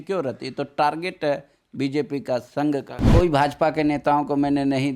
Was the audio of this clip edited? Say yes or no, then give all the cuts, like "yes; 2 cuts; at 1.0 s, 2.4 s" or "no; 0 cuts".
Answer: yes; 1 cut; at 3.0 s